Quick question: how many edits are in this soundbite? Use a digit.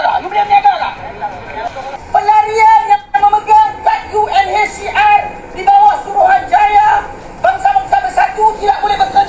1